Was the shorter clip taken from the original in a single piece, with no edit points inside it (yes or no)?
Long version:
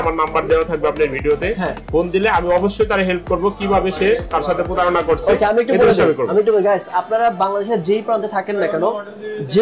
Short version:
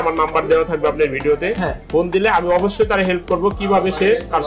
yes